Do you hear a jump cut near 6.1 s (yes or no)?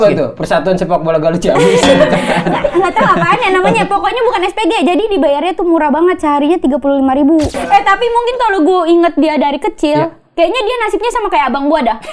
no